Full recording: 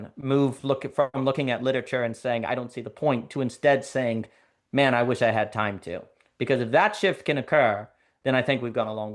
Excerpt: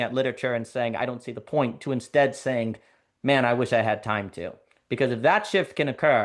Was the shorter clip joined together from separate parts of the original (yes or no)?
no